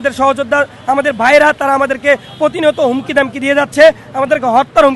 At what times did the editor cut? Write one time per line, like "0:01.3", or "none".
none